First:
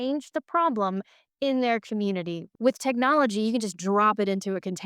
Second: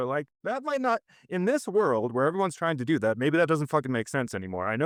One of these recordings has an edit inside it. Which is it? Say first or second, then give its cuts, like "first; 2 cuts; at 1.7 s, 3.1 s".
first; 1 cut; at 2.4 s